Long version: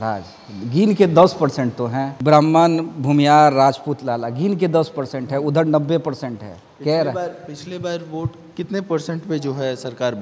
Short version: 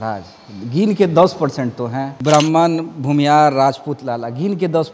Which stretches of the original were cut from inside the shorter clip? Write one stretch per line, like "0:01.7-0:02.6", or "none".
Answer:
none